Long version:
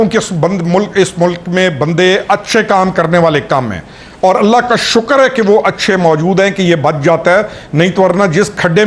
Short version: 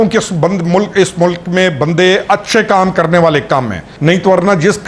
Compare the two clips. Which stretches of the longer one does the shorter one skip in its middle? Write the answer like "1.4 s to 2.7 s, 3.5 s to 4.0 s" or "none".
3.9 s to 7.6 s